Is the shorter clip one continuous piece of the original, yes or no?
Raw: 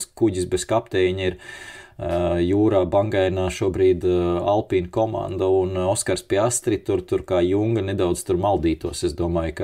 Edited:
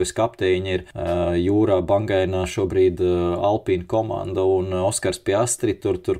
no